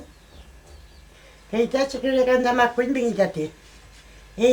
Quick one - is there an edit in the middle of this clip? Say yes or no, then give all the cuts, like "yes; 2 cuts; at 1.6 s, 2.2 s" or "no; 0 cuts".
yes; 1 cut; at 1.0 s